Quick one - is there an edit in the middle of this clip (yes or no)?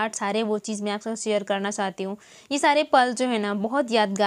no